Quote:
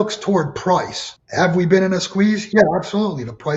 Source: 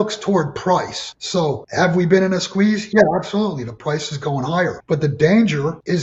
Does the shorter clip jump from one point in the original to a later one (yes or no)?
yes